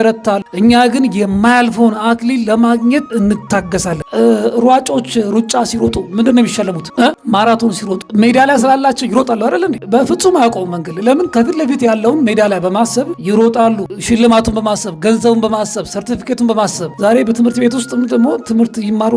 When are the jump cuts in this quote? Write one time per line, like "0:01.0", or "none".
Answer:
0:04.1